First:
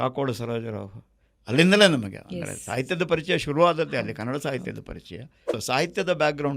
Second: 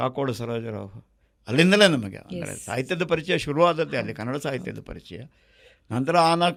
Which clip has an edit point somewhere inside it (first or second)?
first